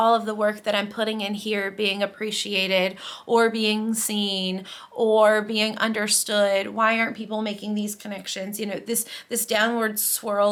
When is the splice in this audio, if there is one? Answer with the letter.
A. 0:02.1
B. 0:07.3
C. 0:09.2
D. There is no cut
D